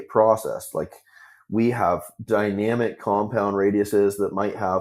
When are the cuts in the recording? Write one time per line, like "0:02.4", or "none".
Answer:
none

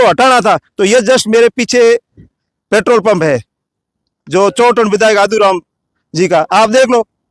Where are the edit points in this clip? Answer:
none

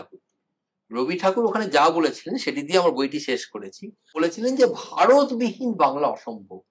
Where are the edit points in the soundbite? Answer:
0:04.1

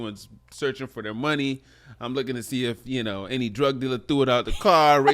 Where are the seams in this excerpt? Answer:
none

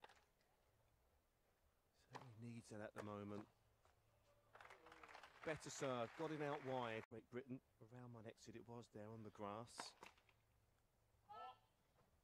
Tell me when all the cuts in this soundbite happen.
0:07.6

